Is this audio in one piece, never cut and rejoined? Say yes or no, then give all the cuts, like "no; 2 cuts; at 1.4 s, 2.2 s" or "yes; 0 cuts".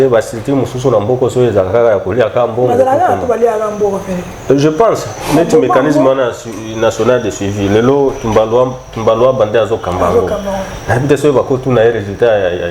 yes; 0 cuts